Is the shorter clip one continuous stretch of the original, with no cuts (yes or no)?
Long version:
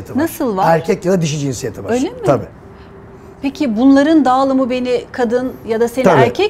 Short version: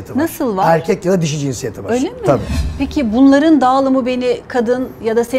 no